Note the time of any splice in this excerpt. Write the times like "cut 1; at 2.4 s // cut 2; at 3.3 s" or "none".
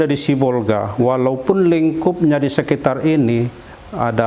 none